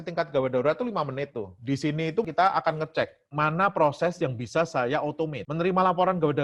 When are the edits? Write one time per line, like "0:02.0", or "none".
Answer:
none